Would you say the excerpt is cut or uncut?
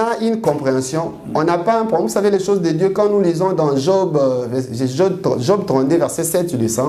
uncut